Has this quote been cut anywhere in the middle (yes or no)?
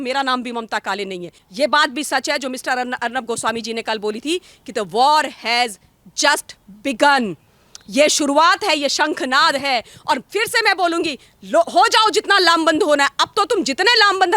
yes